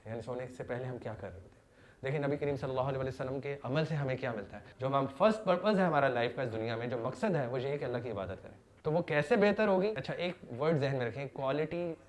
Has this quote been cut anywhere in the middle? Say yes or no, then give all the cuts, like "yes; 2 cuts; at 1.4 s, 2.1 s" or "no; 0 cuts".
yes; 2 cuts; at 4.8 s, 10.0 s